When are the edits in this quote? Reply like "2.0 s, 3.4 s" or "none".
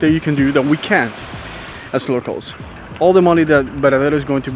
2.5 s